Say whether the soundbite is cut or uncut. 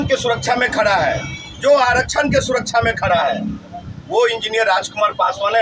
uncut